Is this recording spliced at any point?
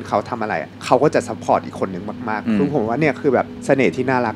yes; 1 cut; at 2.4 s

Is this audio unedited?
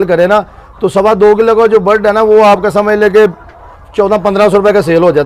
yes; 0 cuts

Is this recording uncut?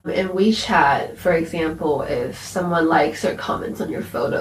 yes; 0 cuts

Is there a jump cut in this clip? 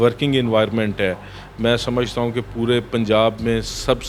no; 0 cuts

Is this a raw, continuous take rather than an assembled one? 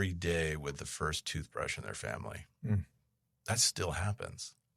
yes; 0 cuts

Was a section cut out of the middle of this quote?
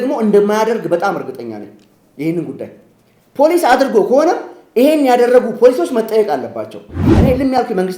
yes; 1 cut; at 7.0 s

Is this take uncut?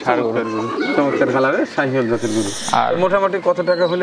no; 1 cut; at 2.6 s

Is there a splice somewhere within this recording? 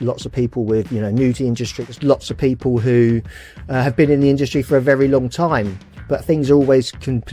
yes; 1 cut; at 1.7 s

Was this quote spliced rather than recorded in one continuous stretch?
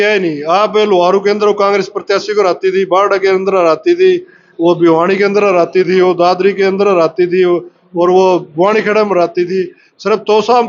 no; 0 cuts

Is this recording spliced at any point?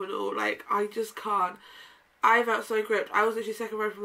no; 0 cuts

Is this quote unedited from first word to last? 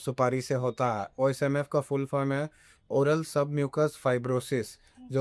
yes; 0 cuts

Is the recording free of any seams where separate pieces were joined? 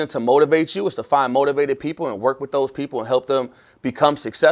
yes; 0 cuts

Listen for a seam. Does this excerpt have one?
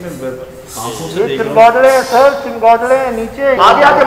no; 0 cuts

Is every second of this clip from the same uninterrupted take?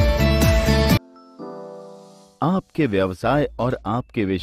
yes; 0 cuts

